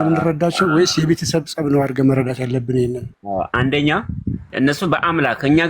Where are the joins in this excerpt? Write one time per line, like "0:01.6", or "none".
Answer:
0:03.1
0:04.4